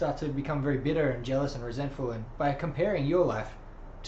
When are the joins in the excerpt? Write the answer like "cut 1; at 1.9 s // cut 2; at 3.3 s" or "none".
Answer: cut 1; at 2.3 s